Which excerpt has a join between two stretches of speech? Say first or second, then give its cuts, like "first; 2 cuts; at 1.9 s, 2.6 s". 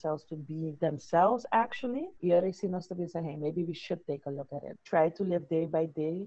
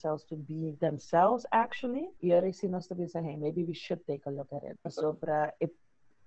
first; 1 cut; at 4.8 s